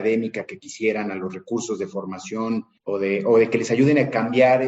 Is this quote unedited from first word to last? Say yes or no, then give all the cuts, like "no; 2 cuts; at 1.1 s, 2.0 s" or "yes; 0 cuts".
no; 1 cut; at 2.7 s